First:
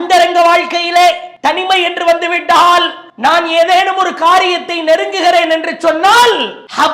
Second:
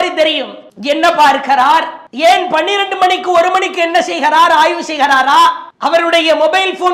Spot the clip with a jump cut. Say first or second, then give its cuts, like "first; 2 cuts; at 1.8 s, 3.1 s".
first; 2 cuts; at 1.3 s, 3.0 s